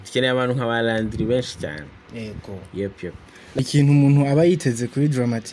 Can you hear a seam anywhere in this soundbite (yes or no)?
yes